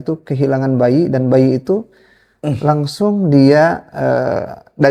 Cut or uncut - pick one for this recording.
uncut